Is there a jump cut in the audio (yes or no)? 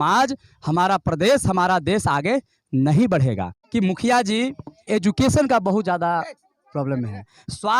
yes